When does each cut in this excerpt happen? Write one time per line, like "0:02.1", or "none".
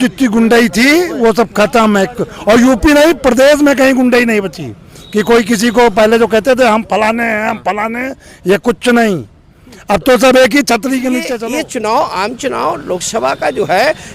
0:11.4